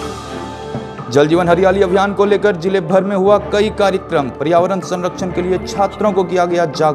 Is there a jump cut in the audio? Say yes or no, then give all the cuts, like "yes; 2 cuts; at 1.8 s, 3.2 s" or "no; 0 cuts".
yes; 1 cut; at 0.9 s